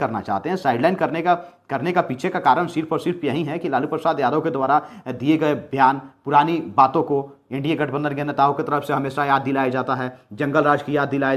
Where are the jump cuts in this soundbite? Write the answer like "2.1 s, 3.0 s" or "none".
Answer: none